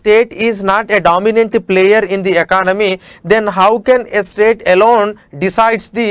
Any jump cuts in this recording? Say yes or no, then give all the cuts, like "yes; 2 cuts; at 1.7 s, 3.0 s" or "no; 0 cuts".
no; 0 cuts